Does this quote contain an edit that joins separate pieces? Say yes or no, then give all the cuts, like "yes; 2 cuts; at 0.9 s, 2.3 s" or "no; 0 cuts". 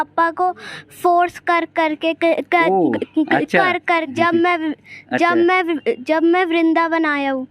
yes; 1 cut; at 4.1 s